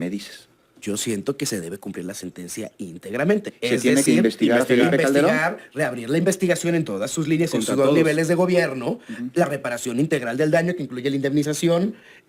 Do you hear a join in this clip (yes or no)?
no